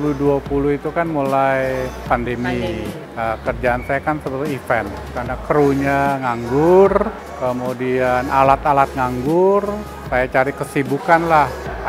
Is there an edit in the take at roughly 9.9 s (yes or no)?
yes